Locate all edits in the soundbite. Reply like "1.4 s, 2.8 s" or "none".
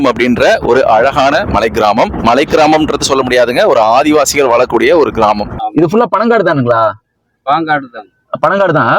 5.6 s